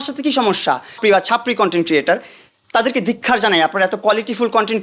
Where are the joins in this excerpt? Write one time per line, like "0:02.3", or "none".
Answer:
0:01.0